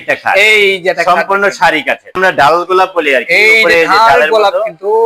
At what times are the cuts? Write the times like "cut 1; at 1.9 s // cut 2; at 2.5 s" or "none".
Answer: cut 1; at 2.2 s

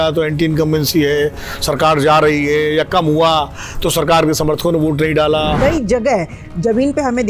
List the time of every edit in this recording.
cut 1; at 5.6 s

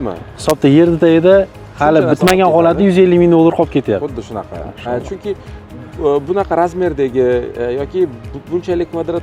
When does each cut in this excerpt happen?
none

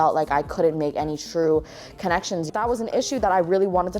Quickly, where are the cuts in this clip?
cut 1; at 2.5 s

